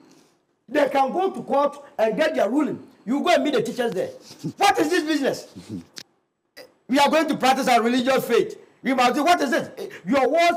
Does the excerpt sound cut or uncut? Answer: uncut